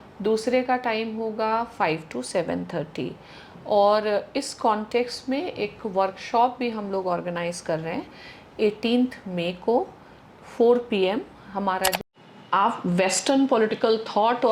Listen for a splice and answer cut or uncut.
cut